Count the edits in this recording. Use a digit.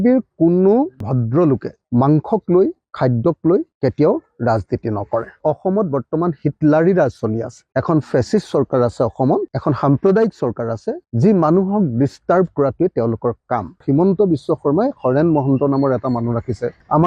2